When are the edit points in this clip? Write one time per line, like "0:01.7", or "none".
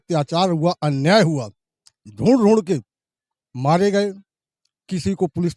none